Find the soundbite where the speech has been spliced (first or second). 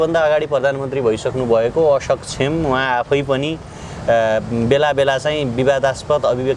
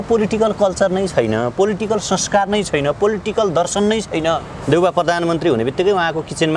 second